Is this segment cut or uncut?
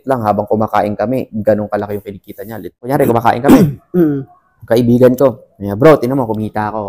cut